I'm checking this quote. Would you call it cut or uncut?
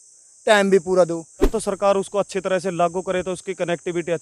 cut